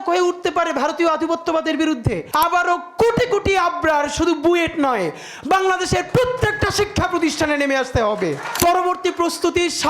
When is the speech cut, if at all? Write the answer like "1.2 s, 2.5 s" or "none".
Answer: 2.2 s, 8.5 s